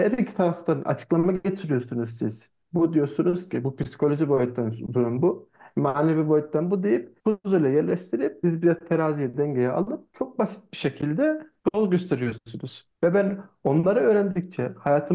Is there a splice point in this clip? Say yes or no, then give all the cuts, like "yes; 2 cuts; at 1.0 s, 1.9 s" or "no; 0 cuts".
no; 0 cuts